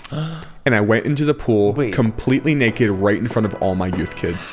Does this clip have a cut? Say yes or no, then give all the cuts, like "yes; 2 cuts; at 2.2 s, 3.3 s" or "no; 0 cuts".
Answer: no; 0 cuts